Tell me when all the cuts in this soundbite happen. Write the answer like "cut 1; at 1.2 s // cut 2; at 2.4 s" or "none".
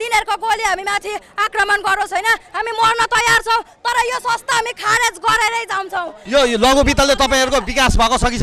cut 1; at 6.2 s